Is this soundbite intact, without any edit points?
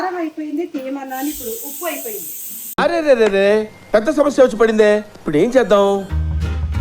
yes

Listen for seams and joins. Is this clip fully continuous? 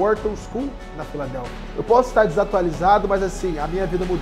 no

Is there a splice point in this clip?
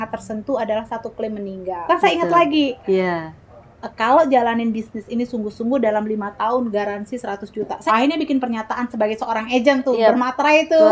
yes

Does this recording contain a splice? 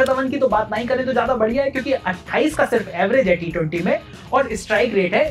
no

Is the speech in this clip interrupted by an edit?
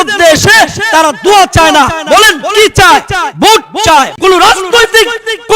yes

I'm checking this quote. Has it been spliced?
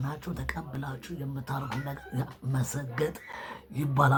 no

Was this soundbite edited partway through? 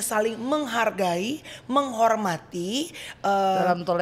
no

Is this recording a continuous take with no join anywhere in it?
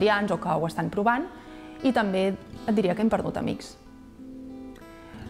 yes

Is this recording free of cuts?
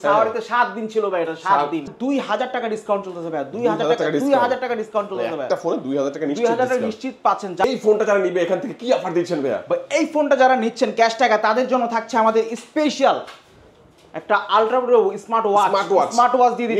no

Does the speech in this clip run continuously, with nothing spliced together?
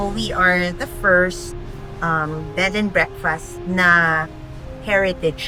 yes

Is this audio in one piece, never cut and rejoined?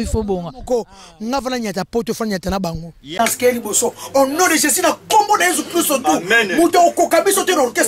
no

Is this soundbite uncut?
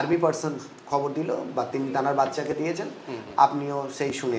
yes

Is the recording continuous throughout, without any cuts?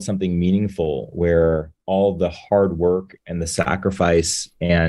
no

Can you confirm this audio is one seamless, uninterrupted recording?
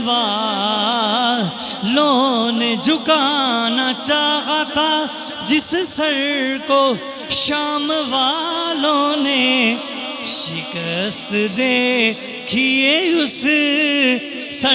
yes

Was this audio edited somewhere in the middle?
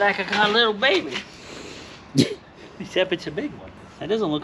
no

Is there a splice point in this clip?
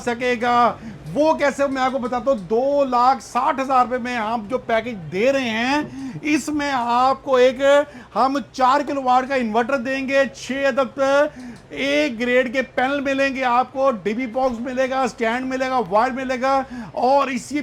no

